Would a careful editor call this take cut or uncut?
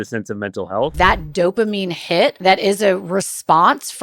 cut